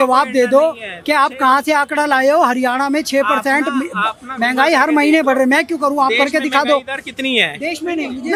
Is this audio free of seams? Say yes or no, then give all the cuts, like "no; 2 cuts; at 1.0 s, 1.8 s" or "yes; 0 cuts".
yes; 0 cuts